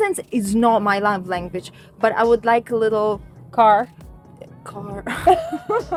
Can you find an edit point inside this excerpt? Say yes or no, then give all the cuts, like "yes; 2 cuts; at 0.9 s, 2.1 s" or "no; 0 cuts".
no; 0 cuts